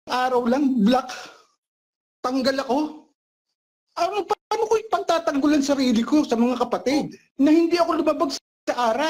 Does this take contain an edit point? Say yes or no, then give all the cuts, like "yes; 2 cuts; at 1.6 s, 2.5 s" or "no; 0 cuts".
yes; 1 cut; at 7.2 s